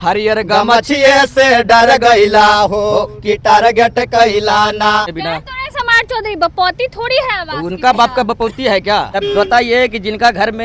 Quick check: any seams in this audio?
yes; 2 cuts; at 5.2 s, 9.1 s

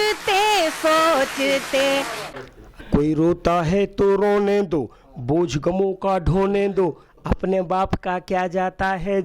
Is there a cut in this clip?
yes; 1 cut; at 2.2 s

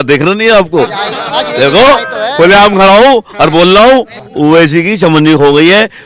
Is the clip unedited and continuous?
no; 1 cut; at 4.3 s

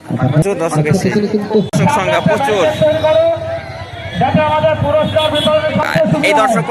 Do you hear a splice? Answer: yes; 1 cut; at 1.7 s

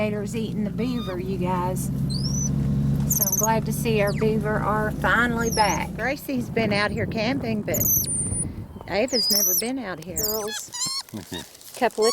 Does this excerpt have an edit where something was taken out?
yes; 2 cuts; at 6.1 s, 10.3 s

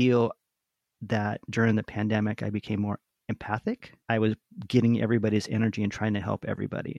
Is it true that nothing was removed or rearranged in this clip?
yes; 0 cuts

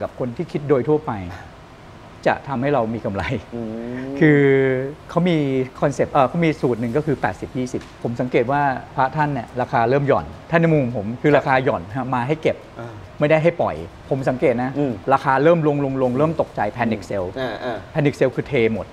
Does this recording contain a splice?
yes; 5 cuts; at 5.0 s, 7.9 s, 10.4 s, 13.9 s, 15.0 s

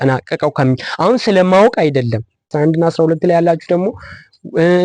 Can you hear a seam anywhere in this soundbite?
yes; 1 cut; at 2.5 s

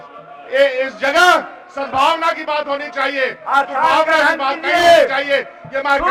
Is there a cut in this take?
no; 0 cuts

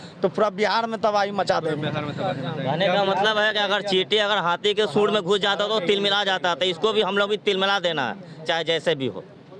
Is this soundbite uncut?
yes; 0 cuts

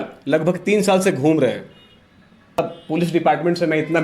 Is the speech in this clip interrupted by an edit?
yes; 1 cut; at 2.6 s

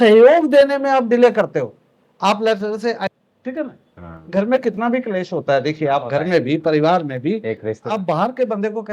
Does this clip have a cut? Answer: yes; 1 cut; at 3.1 s

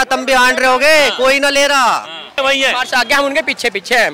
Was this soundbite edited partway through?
yes; 1 cut; at 2.4 s

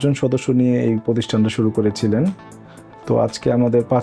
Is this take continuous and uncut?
yes; 0 cuts

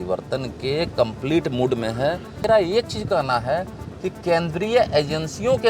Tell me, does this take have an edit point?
yes; 1 cut; at 2.4 s

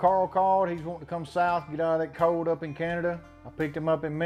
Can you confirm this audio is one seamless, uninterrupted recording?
yes; 0 cuts

